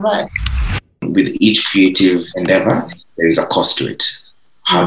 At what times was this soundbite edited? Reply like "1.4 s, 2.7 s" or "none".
0.9 s, 2.3 s